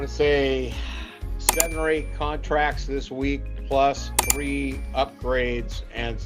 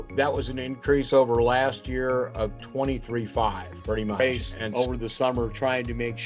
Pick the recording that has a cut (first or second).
second